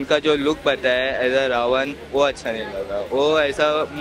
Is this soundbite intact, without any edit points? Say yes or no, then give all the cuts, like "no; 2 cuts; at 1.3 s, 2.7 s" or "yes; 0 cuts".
yes; 0 cuts